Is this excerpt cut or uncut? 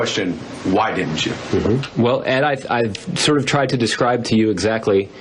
cut